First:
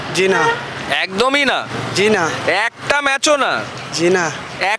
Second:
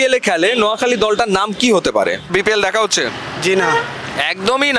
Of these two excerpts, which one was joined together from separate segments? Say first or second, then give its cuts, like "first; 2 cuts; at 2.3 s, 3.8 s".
second; 1 cut; at 2.2 s